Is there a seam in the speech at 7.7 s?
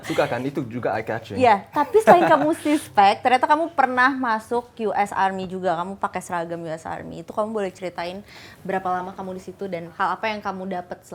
no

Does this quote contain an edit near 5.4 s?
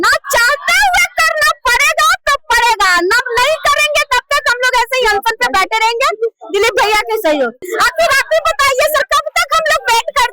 no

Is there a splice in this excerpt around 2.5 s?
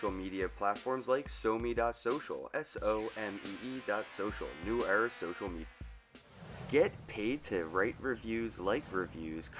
yes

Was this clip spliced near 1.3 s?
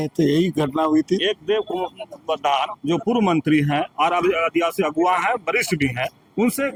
no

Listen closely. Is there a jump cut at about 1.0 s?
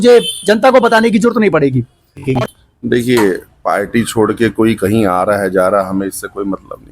no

